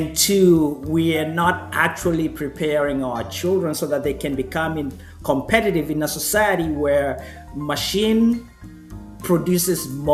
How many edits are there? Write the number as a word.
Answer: zero